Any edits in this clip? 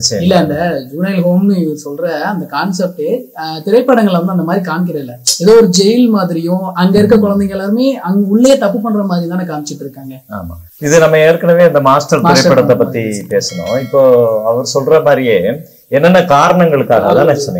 no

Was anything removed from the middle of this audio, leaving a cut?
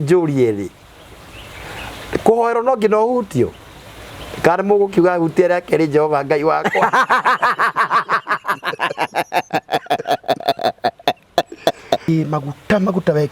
yes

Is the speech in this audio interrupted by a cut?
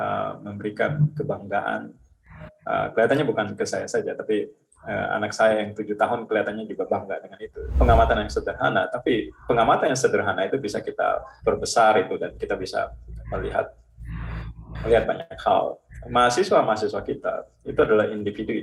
yes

